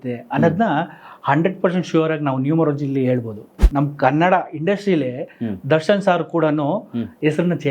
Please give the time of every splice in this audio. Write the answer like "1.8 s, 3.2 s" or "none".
3.5 s